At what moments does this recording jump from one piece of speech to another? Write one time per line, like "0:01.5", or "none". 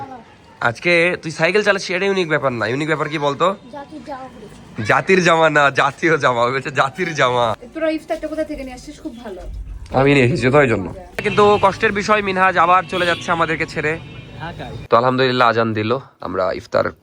0:07.6
0:11.2
0:14.8